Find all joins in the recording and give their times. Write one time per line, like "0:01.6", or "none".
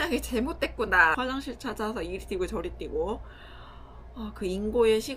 0:01.2